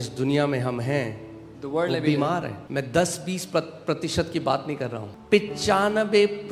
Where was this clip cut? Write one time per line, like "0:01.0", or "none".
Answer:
0:02.6
0:05.1